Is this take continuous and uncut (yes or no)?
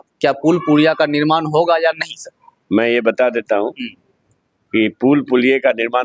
yes